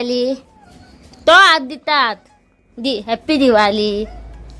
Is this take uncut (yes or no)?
yes